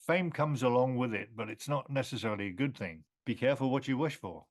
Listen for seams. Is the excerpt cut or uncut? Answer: cut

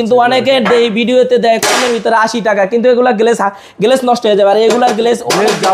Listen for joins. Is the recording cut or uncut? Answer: uncut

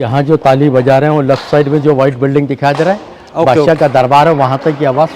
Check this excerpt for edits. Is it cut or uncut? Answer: uncut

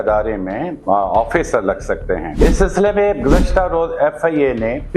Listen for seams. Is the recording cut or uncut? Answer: cut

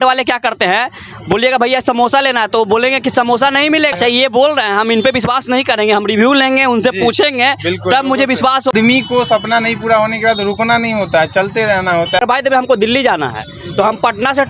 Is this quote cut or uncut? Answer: cut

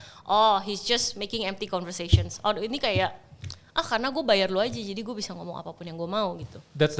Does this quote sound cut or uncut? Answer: uncut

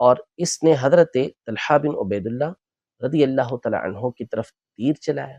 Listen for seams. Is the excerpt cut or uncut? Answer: uncut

